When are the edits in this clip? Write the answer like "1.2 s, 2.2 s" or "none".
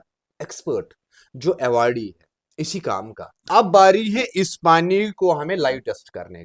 3.4 s